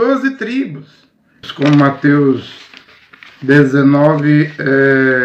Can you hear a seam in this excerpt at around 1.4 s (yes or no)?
yes